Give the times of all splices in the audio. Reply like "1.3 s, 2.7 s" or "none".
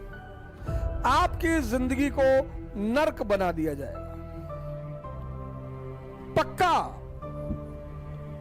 6.9 s